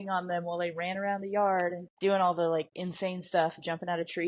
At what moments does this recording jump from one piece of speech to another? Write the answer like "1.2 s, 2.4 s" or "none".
1.9 s, 2.8 s